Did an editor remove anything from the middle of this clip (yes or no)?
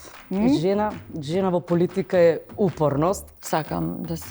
yes